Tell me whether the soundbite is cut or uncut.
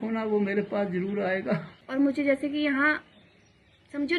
cut